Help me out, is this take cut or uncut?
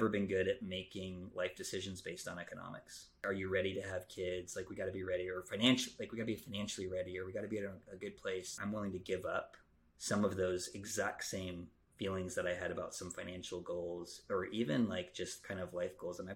cut